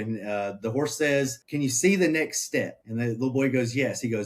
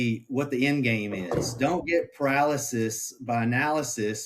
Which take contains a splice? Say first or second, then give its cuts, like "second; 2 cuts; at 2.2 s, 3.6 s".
first; 2 cuts; at 1.4 s, 2.8 s